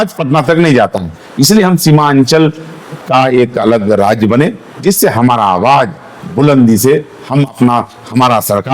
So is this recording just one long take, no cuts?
yes; 0 cuts

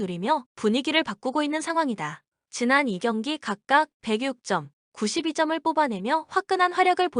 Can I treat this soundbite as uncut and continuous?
no; 1 cut; at 3.7 s

